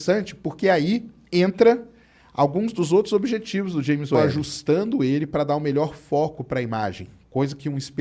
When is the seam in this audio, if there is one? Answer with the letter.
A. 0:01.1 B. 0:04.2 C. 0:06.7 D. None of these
B